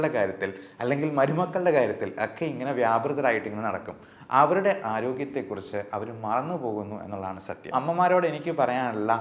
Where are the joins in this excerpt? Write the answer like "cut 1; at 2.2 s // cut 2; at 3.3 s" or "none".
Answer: cut 1; at 7.7 s